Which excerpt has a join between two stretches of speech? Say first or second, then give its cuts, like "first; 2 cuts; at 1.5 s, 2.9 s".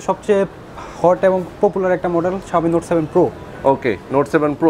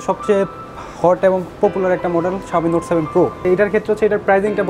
second; 1 cut; at 3.4 s